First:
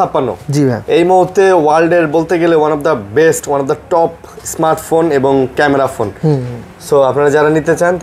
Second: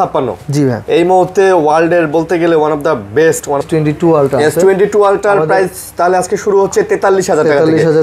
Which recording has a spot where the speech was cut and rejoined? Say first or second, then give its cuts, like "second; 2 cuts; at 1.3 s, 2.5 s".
second; 1 cut; at 3.6 s